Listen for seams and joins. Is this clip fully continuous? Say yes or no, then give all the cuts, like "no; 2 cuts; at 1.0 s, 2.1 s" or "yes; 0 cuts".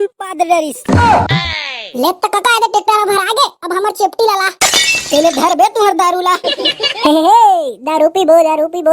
no; 1 cut; at 1.3 s